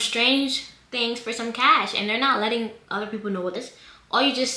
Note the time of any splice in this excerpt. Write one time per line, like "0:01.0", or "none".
0:03.5